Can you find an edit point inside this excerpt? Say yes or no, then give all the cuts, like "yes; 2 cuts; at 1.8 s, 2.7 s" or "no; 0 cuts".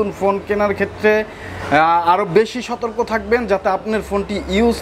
no; 0 cuts